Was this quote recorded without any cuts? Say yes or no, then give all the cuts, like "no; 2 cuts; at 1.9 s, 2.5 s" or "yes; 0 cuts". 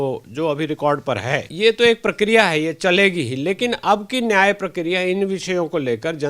no; 1 cut; at 1.4 s